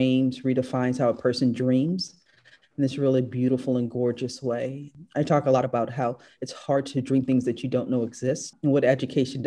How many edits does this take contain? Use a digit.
2